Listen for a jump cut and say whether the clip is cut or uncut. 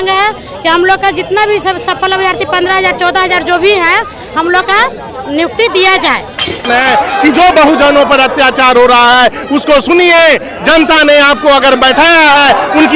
cut